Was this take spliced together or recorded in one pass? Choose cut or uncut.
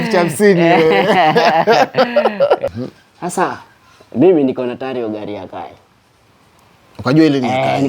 cut